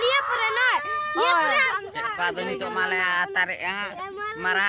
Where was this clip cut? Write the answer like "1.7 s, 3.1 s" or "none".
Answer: 1.5 s